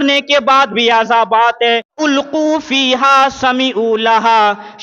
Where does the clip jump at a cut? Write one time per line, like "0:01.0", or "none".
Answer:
0:02.0

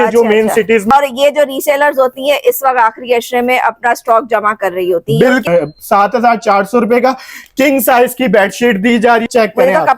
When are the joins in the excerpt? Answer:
0:00.9
0:05.5
0:09.3

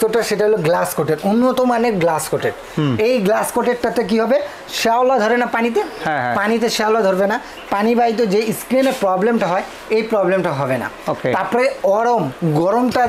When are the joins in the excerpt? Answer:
none

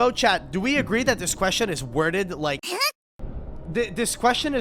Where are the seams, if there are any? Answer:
0:02.6

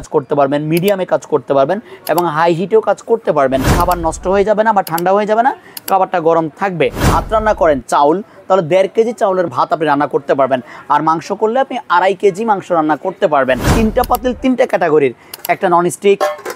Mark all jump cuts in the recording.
0:03.8
0:07.0
0:09.5
0:13.7

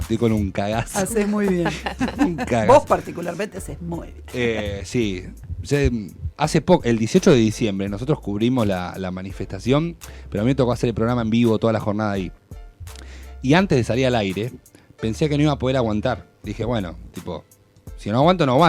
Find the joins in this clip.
none

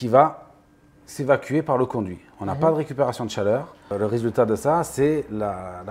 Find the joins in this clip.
0:03.9

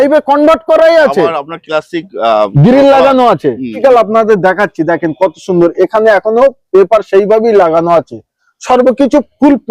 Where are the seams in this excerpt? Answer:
0:03.7

